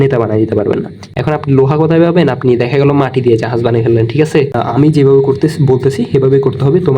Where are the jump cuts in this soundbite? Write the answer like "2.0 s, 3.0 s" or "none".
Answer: 1.0 s, 4.6 s